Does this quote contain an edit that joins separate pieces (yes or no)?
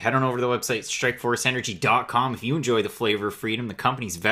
yes